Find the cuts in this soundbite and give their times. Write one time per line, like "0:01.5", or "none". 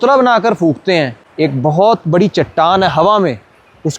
0:01.2